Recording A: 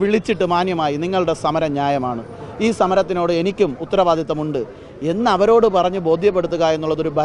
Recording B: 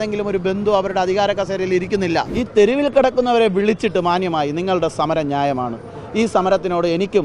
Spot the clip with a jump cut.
B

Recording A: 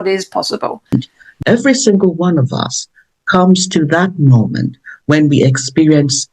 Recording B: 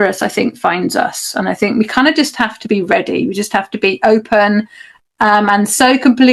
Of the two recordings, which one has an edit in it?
A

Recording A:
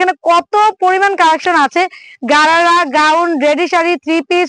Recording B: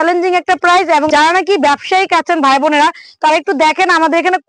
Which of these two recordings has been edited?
B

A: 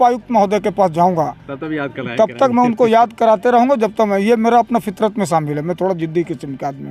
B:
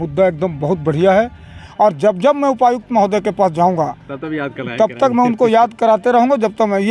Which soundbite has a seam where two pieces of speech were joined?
B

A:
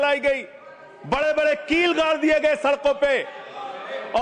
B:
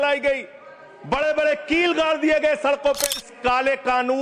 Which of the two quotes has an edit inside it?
B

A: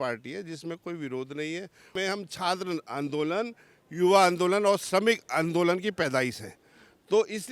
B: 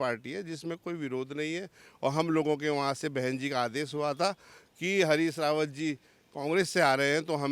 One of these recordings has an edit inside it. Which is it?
A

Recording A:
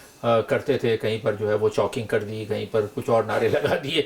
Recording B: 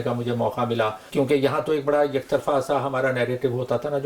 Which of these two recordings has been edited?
B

